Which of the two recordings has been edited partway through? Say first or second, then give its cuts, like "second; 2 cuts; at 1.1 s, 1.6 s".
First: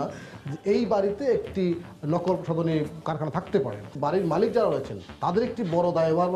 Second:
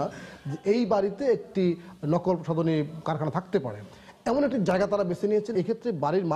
first; 1 cut; at 4.0 s